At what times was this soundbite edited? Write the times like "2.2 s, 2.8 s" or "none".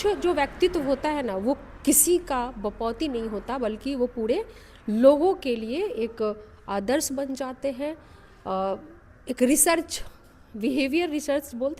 none